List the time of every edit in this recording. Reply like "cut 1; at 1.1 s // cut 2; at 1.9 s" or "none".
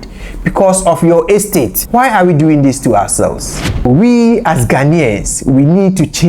cut 1; at 1.8 s // cut 2; at 3.9 s